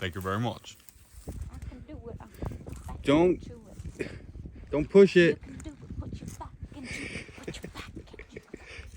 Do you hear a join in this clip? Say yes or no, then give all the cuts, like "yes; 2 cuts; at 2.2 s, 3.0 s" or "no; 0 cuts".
yes; 1 cut; at 1.1 s